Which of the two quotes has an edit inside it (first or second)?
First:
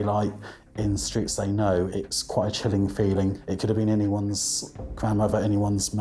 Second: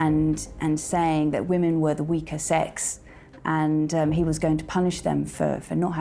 first